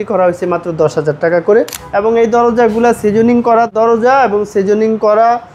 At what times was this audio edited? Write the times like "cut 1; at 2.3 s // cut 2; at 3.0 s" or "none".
cut 1; at 1.8 s // cut 2; at 3.7 s